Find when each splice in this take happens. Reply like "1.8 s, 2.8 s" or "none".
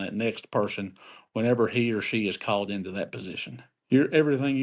3.7 s